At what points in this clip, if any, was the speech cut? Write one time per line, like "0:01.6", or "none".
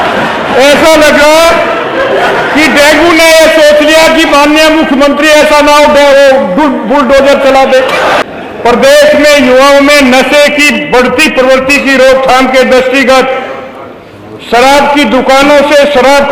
0:08.2